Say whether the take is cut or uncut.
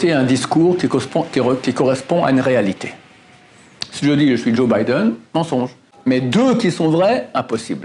cut